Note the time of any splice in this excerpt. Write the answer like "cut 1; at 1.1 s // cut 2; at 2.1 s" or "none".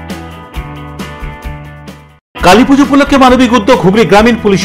cut 1; at 2.2 s